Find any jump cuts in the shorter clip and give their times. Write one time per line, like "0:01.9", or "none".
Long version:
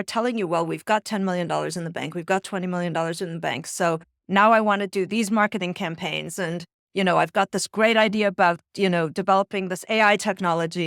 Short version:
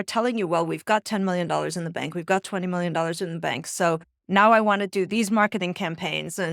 none